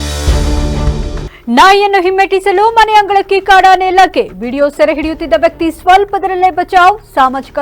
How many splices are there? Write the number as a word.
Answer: one